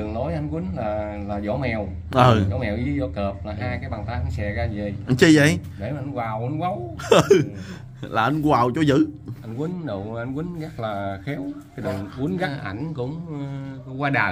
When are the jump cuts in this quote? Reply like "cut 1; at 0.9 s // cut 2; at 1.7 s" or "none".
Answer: cut 1; at 12.5 s